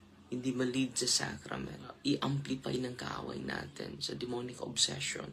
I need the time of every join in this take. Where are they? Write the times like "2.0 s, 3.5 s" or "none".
1.8 s